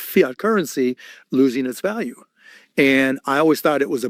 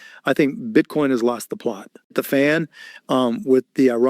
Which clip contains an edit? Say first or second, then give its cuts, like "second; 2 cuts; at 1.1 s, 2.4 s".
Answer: second; 1 cut; at 2.0 s